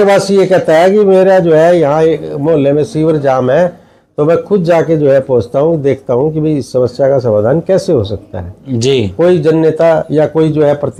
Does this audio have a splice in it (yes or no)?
no